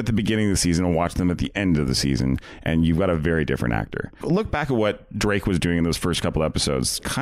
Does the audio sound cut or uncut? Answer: cut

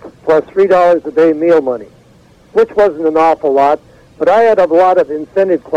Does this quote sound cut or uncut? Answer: uncut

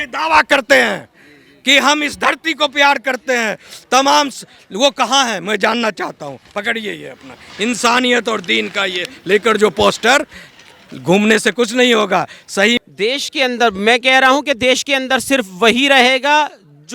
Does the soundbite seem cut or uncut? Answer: cut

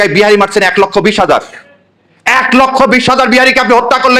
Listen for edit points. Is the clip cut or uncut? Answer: uncut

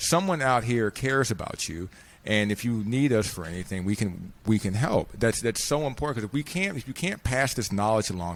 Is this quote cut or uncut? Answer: uncut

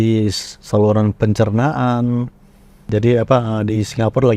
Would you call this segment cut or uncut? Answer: cut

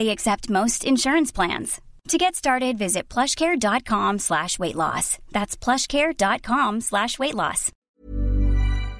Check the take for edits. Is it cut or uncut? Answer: cut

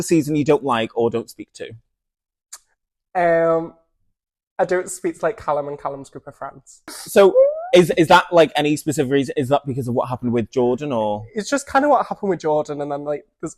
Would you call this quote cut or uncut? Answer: uncut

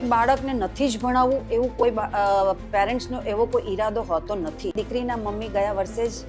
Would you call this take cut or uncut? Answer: cut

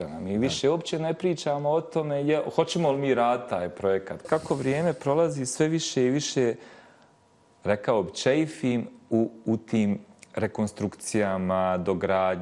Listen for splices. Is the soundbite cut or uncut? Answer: cut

